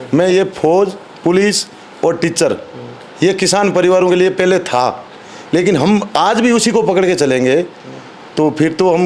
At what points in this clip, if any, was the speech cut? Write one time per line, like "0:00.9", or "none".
none

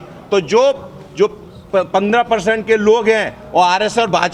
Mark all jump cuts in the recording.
none

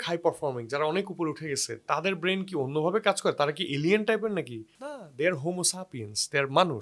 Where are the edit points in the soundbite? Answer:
none

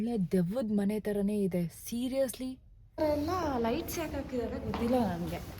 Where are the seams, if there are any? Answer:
0:03.0

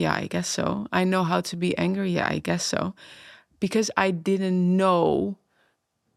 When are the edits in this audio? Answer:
none

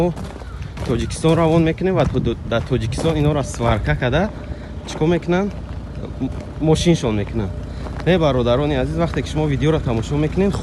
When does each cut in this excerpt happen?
none

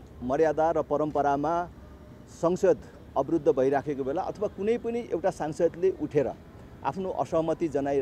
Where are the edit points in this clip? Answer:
none

